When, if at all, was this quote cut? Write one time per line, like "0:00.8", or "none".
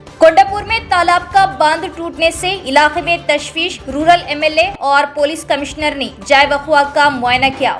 none